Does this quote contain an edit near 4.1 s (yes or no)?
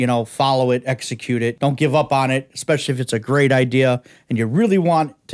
no